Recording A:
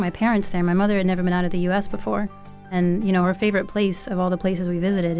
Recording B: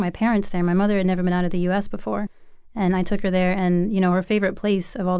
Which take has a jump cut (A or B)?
A